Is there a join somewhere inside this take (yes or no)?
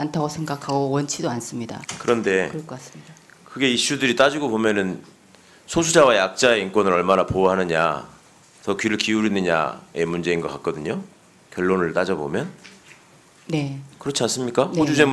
yes